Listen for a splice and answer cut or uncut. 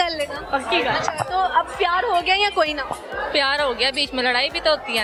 uncut